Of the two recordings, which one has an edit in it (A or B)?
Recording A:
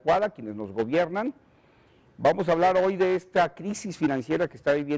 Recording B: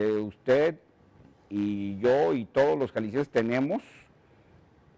B